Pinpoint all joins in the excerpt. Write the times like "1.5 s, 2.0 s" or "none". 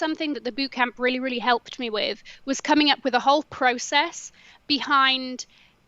none